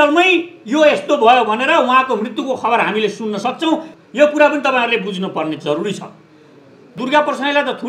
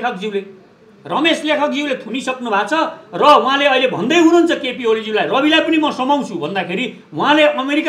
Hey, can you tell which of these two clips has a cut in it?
first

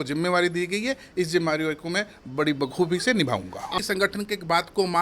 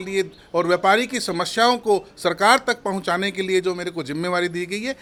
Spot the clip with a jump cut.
first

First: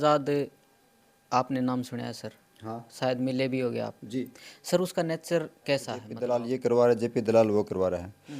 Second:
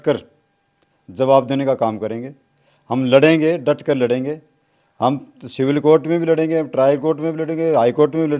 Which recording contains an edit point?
first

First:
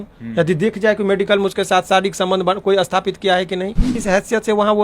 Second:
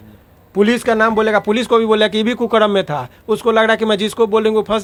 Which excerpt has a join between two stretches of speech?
first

